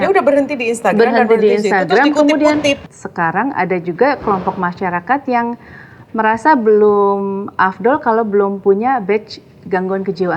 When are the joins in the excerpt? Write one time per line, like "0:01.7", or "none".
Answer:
0:02.9